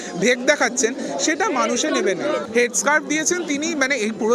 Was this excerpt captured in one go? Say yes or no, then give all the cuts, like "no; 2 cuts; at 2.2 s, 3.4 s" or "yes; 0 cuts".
yes; 0 cuts